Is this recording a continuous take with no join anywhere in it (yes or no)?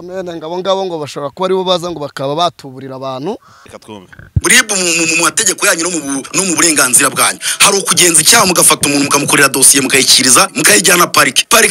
no